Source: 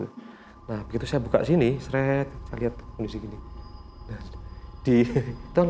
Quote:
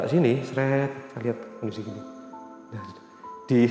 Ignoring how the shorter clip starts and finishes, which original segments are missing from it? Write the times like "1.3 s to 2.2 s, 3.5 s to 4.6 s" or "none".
none